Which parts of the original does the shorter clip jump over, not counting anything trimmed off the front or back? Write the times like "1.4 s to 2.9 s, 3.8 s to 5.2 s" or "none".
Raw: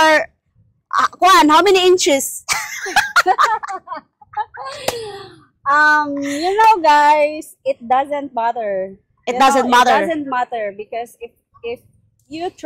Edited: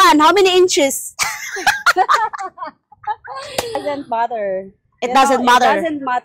5.1 s to 8.1 s